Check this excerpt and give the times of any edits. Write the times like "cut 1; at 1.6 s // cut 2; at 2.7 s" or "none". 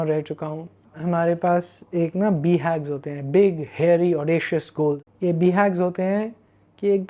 cut 1; at 5.1 s